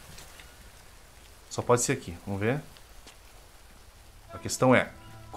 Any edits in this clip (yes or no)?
no